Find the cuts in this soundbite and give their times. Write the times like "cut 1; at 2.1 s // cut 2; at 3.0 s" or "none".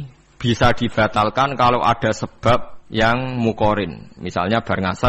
cut 1; at 2.8 s